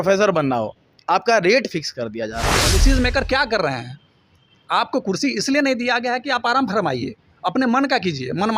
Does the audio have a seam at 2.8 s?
yes; 1 cut; at 2.8 s

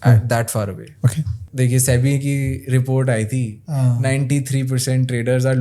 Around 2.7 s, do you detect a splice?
no; 1 cut; at 1.4 s

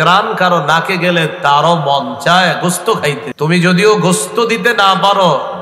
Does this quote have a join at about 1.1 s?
no; 1 cut; at 3.3 s

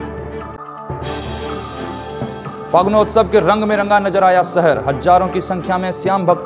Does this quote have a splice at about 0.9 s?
no; 1 cut; at 2.4 s

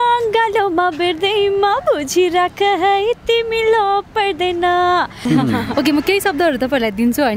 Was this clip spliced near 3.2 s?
no; 1 cut; at 5.2 s

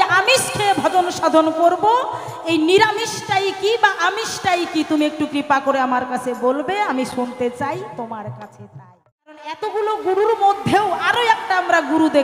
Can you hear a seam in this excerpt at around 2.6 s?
no; 1 cut; at 9.5 s

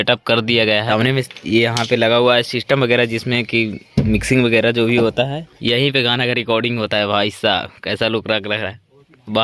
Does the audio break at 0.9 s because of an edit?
yes; 2 cuts; at 0.9 s, 5.5 s

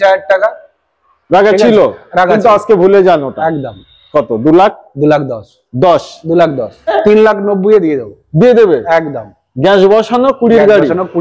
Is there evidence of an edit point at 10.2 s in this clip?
no; 1 cut; at 7.0 s

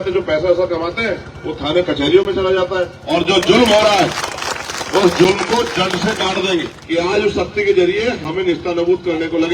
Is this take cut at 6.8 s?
yes; 2 cuts; at 3.0 s, 6.8 s

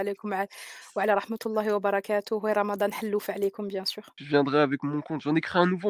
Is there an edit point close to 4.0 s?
yes; 1 cut; at 4.0 s

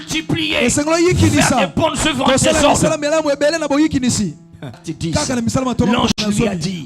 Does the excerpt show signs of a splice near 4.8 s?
yes; 1 cut; at 4.8 s

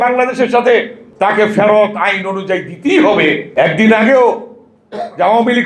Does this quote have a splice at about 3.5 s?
yes; 1 cut; at 3.5 s

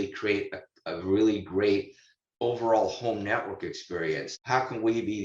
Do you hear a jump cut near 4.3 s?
yes; 1 cut; at 4.3 s

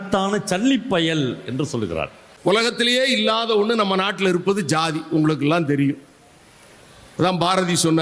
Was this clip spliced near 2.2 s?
yes; 1 cut; at 2.2 s

